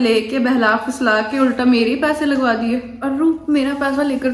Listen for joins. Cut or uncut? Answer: cut